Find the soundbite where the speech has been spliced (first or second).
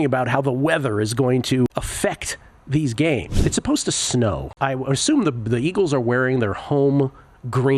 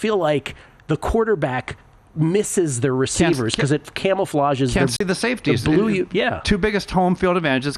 first